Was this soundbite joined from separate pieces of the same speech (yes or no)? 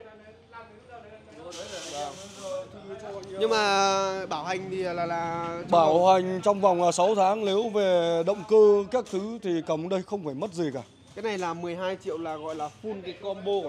no